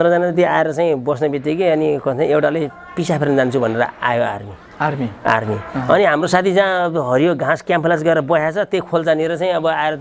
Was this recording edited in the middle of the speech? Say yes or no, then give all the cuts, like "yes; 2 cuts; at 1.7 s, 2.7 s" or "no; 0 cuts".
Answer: no; 0 cuts